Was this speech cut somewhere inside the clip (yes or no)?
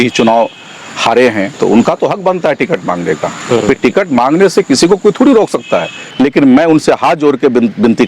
yes